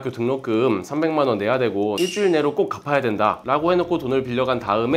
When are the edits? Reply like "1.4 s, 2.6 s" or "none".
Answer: 1.9 s, 3.4 s